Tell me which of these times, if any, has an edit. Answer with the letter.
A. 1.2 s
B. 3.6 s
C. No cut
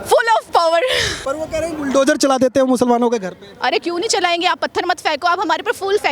A